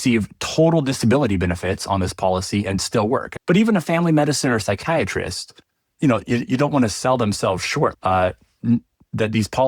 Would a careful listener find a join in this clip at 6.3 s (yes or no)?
no